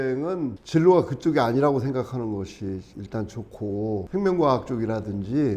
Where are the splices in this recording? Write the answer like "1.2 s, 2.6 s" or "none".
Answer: 4.1 s